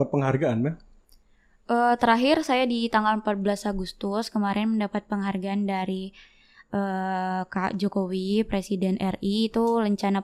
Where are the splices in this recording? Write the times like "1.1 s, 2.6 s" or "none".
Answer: none